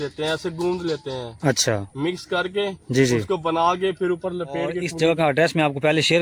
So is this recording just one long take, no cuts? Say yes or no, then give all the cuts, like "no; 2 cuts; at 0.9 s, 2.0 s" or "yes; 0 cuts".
no; 1 cut; at 4.9 s